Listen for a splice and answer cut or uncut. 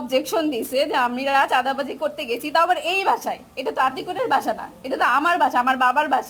uncut